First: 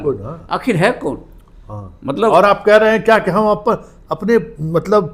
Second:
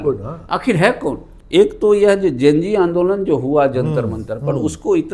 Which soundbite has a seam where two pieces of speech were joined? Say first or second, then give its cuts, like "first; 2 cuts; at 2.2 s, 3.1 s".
second; 1 cut; at 1.3 s